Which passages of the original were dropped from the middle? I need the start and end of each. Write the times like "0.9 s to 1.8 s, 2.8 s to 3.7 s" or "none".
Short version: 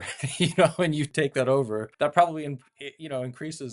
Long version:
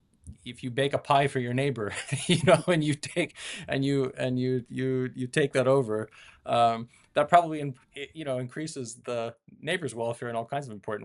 3.0 s to 5.3 s, 6.1 s to 7.0 s

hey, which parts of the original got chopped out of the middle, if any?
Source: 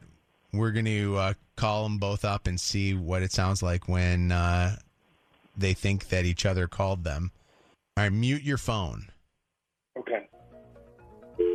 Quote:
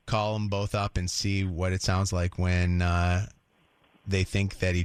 none

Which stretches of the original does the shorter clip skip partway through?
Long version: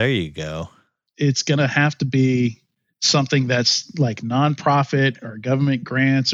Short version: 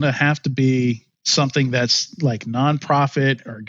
2.7 s to 2.9 s

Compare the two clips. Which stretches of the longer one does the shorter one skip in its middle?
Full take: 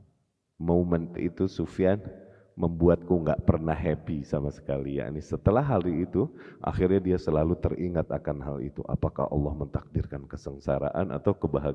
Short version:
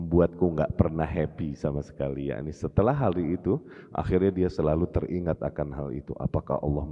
none

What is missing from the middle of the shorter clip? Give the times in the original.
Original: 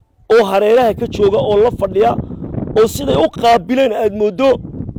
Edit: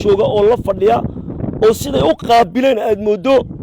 none

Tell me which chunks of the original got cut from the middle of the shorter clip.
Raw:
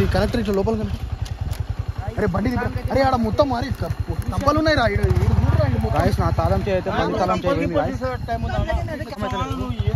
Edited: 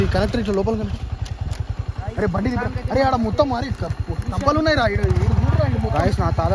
none

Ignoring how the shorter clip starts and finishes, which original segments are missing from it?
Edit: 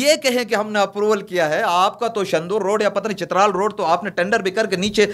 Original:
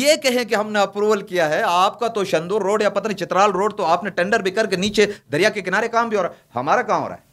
none

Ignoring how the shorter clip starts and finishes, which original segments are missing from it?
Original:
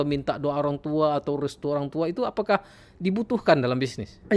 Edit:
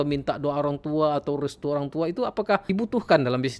2.6 s to 3.0 s

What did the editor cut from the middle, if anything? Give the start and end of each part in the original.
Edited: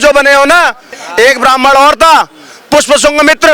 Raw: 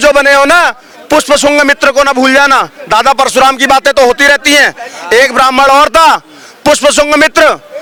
0.9 s to 4.8 s

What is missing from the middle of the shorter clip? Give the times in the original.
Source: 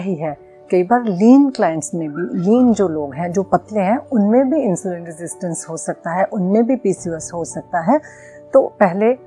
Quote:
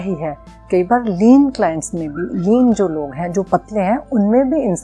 none

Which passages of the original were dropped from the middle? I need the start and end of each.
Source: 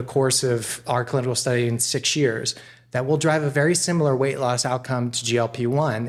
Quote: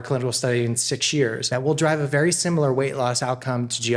2.4 s to 2.8 s

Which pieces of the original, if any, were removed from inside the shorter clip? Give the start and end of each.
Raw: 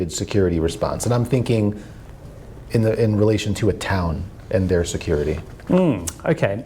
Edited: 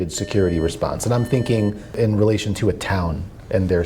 2.0 s to 3.0 s

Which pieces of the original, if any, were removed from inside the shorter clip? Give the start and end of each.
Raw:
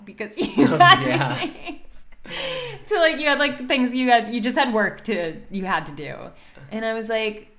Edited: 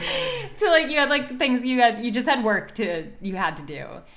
none

